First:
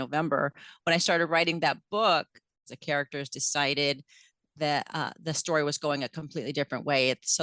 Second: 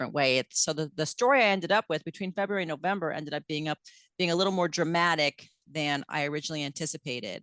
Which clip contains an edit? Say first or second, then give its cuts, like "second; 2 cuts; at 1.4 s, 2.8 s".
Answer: first; 1 cut; at 2.7 s